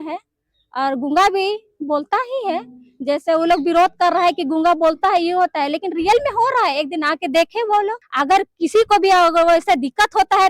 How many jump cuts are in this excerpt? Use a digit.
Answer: 1